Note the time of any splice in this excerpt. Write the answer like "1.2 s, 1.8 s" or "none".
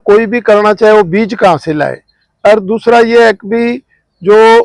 none